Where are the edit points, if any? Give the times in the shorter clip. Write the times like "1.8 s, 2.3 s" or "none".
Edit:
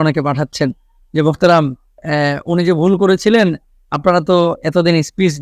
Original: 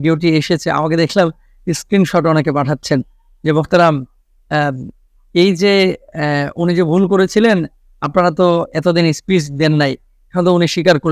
2.0 s

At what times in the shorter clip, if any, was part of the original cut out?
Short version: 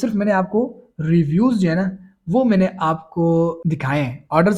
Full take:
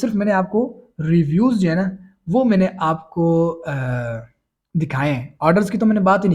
3.6 s

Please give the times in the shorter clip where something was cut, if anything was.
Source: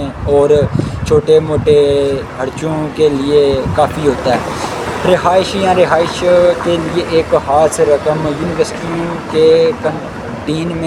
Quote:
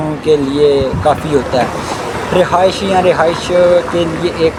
none

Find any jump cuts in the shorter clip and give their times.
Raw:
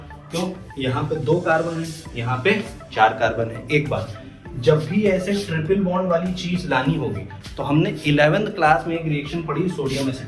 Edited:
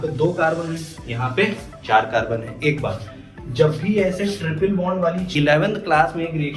5.3 s

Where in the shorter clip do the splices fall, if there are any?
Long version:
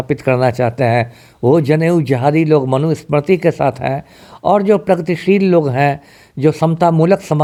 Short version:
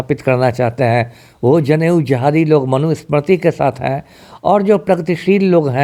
none

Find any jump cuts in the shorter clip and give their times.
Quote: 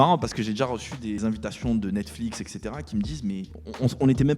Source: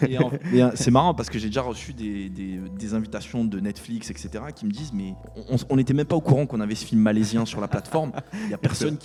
1.2 s

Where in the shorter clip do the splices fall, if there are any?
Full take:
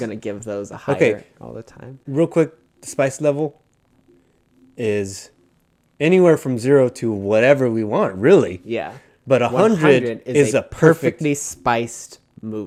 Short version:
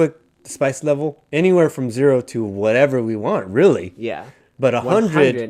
1.2 s

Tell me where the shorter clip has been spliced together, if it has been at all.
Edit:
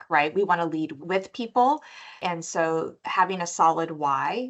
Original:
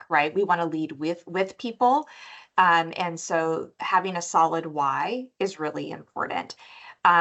1.0 s, 2.2 s

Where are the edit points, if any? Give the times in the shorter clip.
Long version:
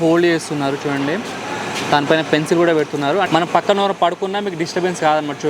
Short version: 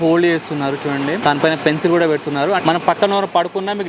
1.2 s

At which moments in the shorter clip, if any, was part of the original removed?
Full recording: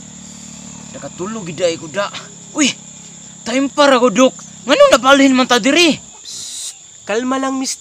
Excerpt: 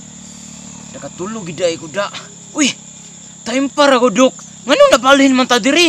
none

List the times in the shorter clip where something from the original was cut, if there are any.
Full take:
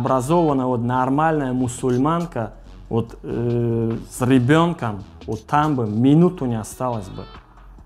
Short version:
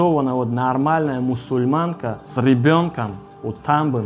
2.2 s

